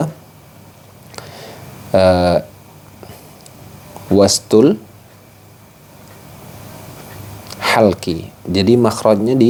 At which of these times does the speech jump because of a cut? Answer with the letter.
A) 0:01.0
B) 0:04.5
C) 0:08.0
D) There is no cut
D